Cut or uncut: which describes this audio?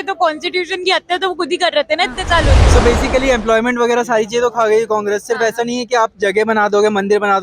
cut